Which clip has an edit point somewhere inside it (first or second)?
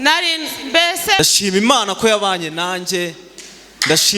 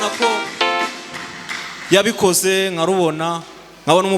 first